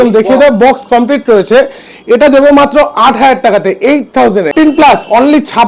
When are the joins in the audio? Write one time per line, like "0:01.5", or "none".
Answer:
0:04.5